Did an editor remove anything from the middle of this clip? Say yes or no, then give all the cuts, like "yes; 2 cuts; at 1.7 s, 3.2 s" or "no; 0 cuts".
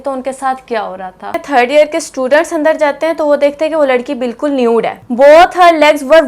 yes; 2 cuts; at 1.4 s, 5.0 s